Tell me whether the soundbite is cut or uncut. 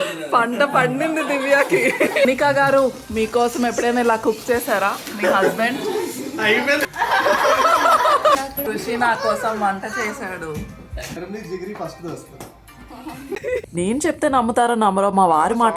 cut